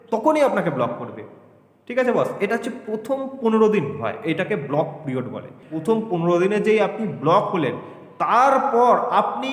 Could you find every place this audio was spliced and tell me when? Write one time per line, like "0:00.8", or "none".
0:05.7